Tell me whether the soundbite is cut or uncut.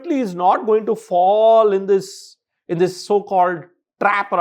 uncut